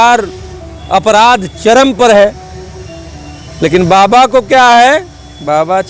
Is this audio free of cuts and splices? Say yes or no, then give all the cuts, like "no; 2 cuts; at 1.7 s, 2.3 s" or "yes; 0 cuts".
yes; 0 cuts